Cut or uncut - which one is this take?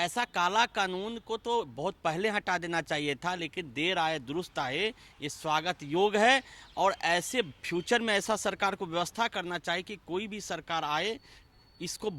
uncut